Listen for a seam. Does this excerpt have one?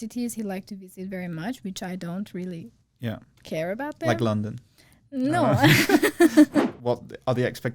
yes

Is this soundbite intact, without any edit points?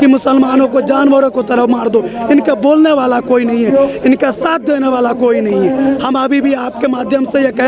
yes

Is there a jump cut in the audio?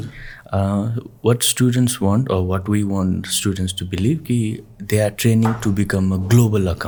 no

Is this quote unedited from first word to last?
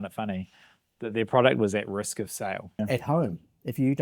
no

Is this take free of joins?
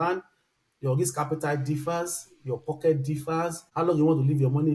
no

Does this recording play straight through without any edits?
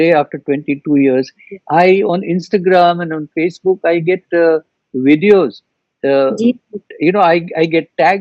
yes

